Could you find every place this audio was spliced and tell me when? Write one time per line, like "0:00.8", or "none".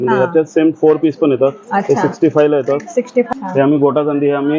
0:03.3